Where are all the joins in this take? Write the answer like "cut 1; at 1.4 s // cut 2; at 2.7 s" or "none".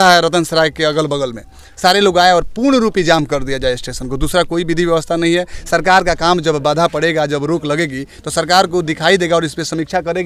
none